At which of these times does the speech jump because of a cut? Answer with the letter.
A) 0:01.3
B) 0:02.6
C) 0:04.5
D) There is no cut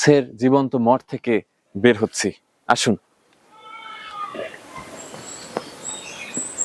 D